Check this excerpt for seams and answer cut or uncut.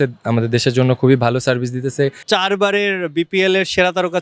cut